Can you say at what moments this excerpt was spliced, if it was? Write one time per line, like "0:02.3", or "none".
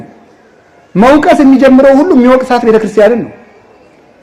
none